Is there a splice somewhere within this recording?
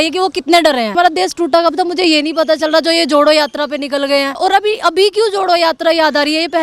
yes; 2 cuts; at 1.0 s, 4.4 s

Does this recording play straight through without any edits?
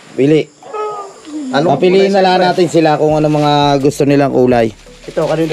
yes; 0 cuts

